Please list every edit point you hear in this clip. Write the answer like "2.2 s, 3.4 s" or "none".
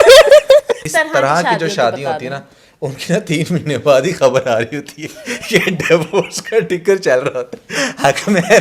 0.9 s, 7.6 s